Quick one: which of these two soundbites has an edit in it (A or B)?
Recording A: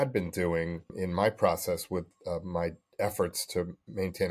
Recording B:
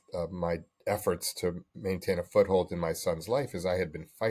A